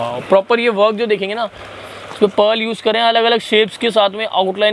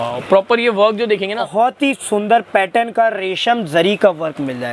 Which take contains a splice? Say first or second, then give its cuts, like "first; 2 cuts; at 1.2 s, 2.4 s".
second; 1 cut; at 1.5 s